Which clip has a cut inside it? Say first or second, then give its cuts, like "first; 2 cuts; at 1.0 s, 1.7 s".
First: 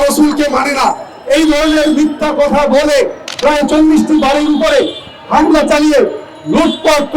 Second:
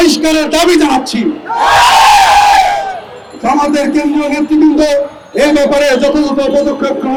first; 1 cut; at 3.2 s